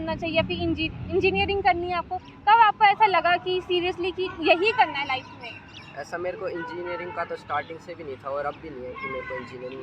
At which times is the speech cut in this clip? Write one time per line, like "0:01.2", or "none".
none